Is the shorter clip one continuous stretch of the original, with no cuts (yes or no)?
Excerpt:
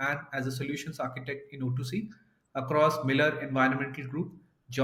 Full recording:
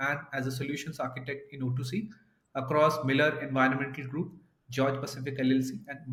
yes